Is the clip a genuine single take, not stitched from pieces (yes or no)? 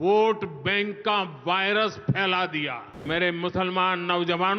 no